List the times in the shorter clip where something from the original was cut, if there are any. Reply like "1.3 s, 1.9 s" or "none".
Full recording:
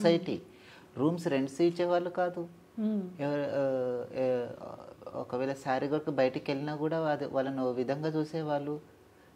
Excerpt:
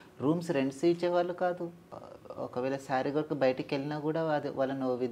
1.9 s